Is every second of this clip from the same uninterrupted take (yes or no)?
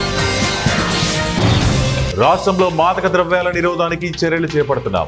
no